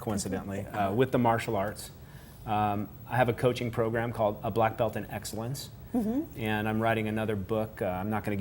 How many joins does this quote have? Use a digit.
1